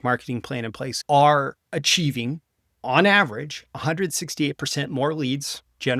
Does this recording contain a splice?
yes; 1 cut; at 1.0 s

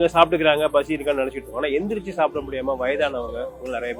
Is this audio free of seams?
yes; 0 cuts

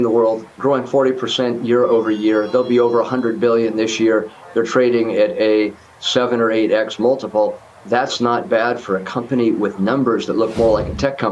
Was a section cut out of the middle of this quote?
no; 0 cuts

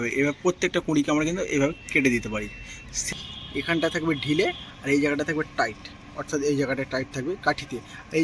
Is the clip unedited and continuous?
no; 1 cut; at 3.0 s

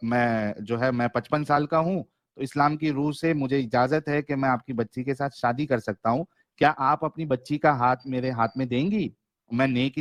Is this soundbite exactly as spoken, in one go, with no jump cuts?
yes; 0 cuts

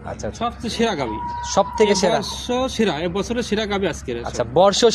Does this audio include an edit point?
no; 0 cuts

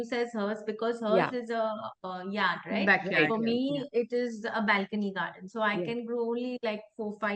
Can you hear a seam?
no; 0 cuts

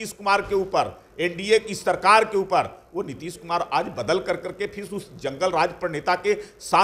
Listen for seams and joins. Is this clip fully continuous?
yes; 0 cuts

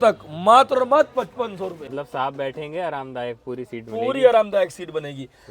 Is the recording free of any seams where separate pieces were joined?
no; 1 cut; at 1.9 s

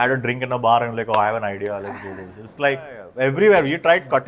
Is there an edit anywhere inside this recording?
yes; 1 cut; at 3.0 s

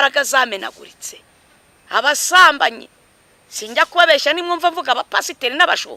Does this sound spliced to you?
no; 0 cuts

